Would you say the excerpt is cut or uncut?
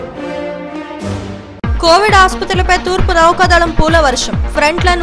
uncut